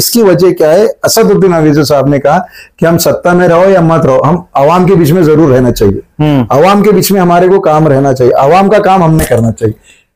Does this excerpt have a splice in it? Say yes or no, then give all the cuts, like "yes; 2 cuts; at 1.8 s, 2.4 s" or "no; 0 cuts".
no; 0 cuts